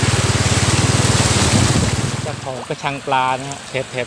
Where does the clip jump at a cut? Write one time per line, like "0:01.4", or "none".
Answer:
0:02.1